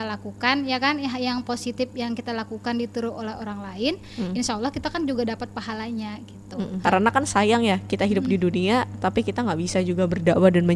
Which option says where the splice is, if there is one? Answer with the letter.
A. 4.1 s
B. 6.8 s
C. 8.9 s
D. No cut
B